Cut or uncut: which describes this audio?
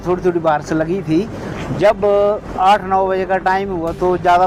uncut